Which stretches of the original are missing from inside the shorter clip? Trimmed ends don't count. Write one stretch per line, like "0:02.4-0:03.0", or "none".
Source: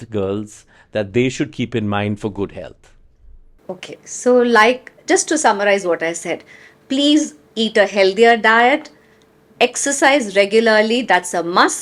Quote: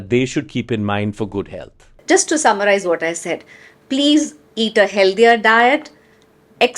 0:02.9-0:04.9